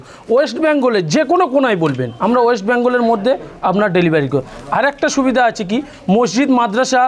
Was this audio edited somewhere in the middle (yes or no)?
yes